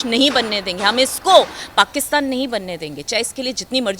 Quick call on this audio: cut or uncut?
uncut